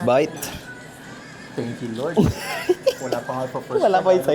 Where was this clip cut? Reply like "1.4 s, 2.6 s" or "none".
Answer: none